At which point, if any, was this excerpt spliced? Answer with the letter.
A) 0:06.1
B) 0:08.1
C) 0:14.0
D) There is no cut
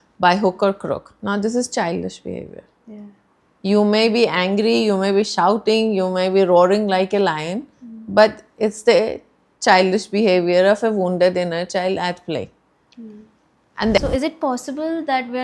C